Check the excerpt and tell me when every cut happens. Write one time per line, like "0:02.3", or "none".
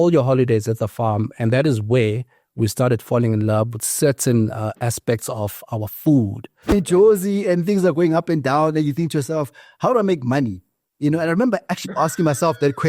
0:06.7